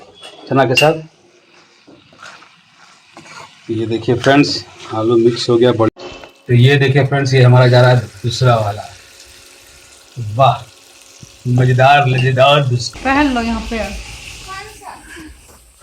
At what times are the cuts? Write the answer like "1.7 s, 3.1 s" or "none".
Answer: 5.9 s, 12.8 s